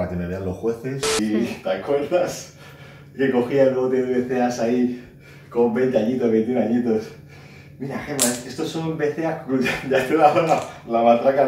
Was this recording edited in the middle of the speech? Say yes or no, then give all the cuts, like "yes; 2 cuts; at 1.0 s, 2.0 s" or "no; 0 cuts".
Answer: yes; 1 cut; at 1.2 s